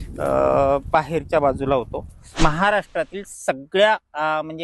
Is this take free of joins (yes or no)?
no